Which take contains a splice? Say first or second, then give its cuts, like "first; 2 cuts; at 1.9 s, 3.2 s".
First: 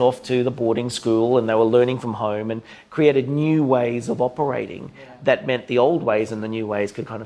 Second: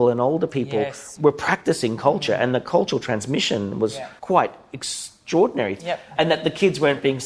second; 3 cuts; at 1.0 s, 4.1 s, 5.9 s